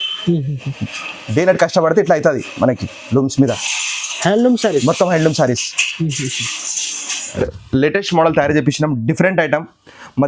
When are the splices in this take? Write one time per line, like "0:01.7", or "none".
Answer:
0:07.4